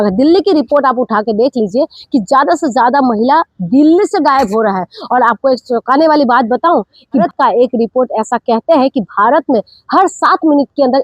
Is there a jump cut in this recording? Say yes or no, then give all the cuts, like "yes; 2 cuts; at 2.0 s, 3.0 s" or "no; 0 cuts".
no; 0 cuts